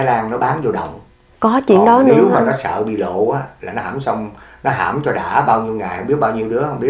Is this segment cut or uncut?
uncut